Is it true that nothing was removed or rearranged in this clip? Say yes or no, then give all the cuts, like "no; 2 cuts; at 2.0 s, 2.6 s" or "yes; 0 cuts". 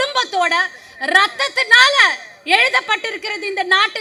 yes; 0 cuts